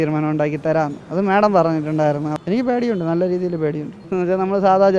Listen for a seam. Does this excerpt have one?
yes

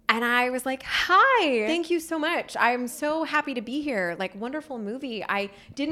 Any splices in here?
yes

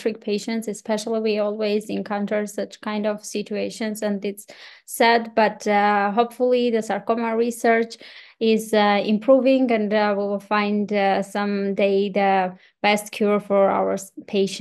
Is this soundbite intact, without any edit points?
yes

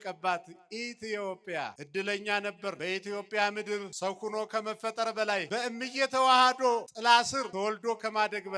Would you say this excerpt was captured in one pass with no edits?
no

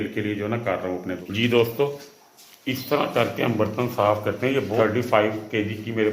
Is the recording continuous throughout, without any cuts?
no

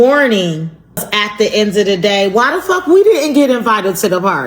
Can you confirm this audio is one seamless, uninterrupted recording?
no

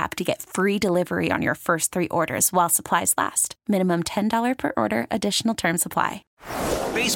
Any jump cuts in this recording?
yes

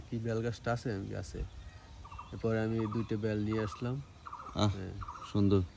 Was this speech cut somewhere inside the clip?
no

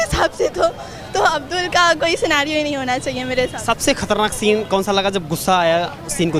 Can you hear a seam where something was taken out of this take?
no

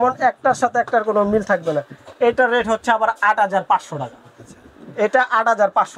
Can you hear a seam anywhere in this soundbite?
no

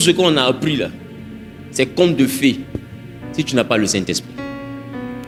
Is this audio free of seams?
yes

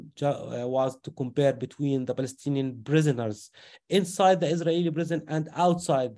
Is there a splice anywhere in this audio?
no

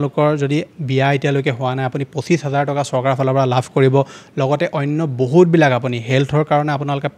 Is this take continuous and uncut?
yes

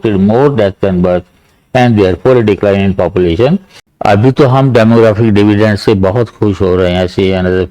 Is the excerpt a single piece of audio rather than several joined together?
no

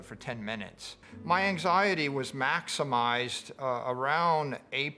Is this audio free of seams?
no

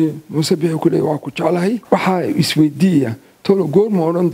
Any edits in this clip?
yes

